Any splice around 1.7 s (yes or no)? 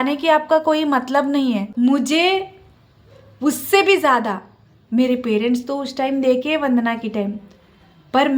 yes